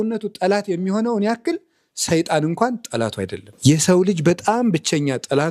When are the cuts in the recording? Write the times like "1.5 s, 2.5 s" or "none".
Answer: 3.4 s